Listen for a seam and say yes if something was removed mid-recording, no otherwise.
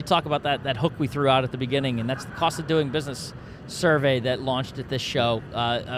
no